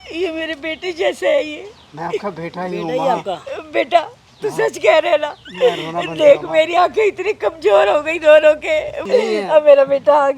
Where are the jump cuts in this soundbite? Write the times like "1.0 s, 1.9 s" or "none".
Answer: 9.0 s